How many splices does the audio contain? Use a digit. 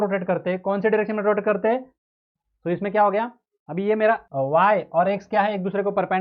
2